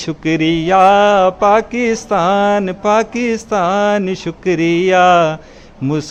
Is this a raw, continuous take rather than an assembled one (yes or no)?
yes